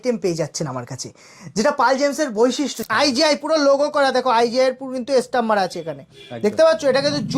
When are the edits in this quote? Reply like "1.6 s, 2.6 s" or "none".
2.8 s